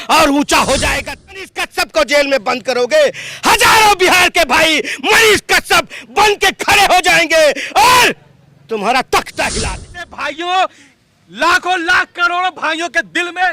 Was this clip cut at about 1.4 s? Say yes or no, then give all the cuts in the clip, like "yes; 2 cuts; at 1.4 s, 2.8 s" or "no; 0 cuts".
yes; 2 cuts; at 1.4 s, 10.0 s